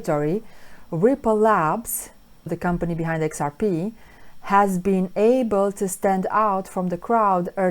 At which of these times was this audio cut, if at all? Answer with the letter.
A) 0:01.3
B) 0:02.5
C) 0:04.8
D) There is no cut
B